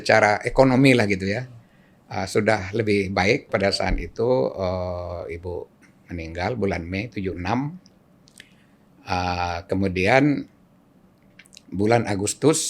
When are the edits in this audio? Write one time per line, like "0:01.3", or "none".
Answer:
0:03.5